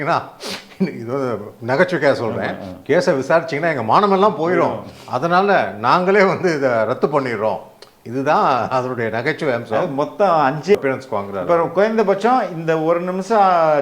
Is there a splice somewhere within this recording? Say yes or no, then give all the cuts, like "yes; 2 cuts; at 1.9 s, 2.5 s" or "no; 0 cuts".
yes; 1 cut; at 10.8 s